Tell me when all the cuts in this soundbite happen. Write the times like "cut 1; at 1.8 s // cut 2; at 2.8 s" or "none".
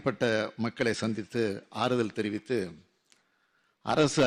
none